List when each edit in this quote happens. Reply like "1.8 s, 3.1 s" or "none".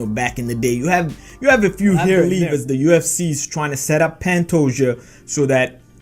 2.3 s